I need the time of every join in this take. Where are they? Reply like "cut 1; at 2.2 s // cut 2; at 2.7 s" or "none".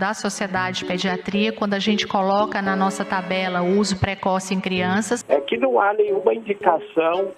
cut 1; at 5.2 s